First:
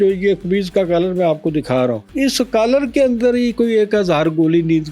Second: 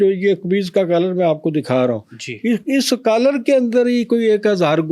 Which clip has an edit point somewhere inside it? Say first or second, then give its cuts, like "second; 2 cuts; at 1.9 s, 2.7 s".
first; 1 cut; at 2.1 s